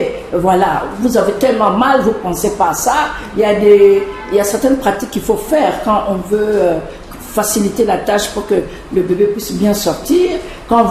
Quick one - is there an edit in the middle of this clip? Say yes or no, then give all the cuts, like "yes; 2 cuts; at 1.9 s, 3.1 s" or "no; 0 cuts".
no; 0 cuts